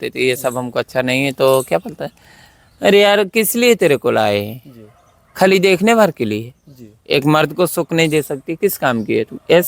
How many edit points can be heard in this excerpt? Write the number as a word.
zero